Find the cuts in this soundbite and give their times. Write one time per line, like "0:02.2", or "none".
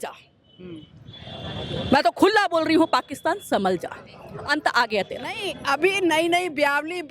0:05.5

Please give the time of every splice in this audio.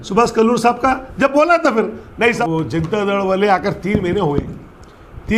0:02.4

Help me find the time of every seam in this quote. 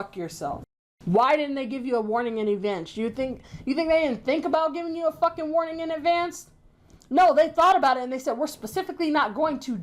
0:00.9

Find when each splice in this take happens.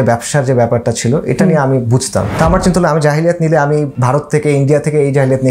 0:02.3
0:03.9

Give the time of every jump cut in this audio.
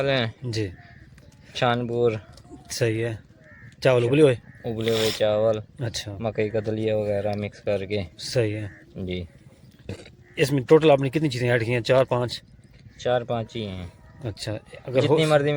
none

